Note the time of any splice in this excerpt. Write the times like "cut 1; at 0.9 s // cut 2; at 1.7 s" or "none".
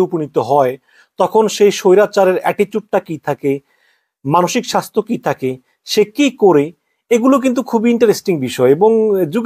none